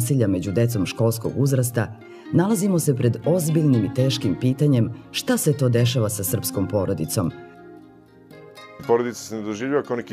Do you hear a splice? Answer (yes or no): yes